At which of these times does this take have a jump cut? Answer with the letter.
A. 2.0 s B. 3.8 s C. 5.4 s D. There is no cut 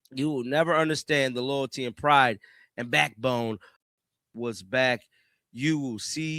B